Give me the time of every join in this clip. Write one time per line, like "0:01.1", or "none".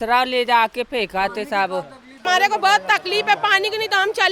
0:02.2